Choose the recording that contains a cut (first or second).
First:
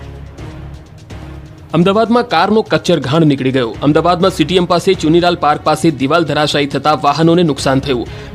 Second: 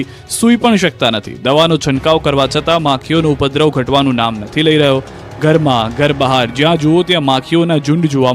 first